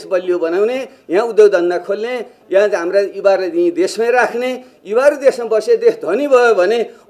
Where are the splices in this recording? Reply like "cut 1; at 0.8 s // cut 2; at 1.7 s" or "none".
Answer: none